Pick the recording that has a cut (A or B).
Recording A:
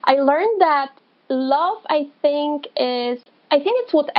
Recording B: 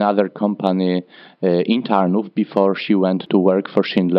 B